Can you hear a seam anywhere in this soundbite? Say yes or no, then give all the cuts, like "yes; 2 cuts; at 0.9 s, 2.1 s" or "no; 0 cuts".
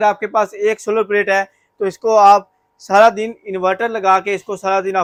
no; 0 cuts